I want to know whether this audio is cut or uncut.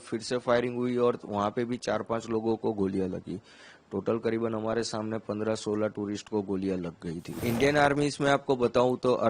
cut